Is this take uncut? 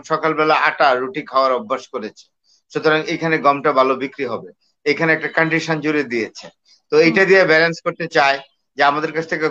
yes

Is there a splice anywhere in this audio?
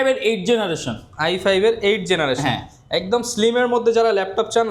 no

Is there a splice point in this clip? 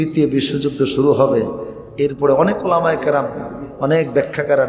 no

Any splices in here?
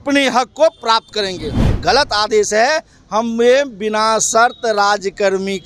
yes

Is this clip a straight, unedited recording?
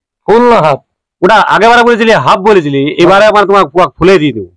yes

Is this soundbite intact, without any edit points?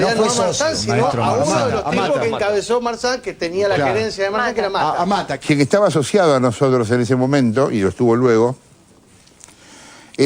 no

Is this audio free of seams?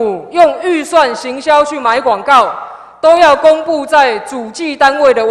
yes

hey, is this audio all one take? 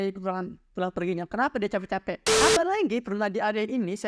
no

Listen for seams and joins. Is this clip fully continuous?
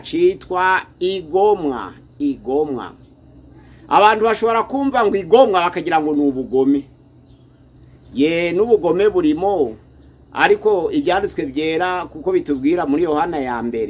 yes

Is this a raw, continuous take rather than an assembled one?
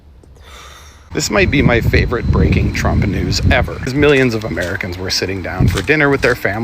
no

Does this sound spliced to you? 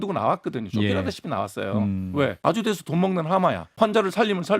yes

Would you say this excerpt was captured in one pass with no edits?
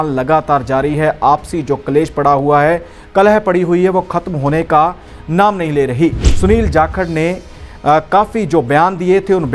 no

